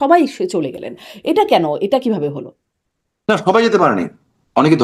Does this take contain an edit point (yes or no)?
no